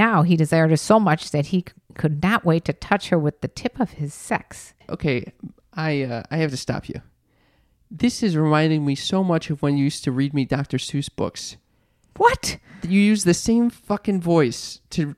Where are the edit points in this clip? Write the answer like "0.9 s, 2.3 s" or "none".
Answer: 4.8 s